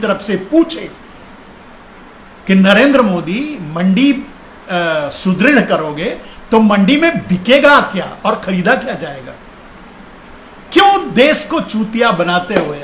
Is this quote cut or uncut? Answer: uncut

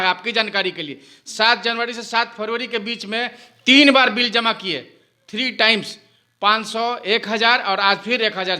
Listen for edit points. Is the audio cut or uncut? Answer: uncut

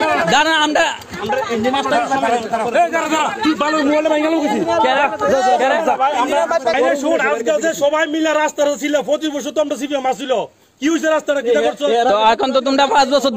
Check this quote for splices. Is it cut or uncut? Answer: cut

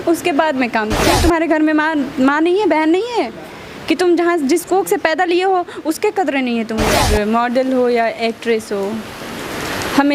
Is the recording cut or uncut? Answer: cut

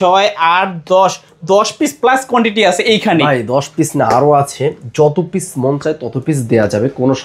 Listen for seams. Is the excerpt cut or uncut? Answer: uncut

